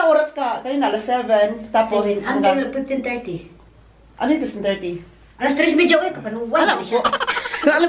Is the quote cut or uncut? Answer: uncut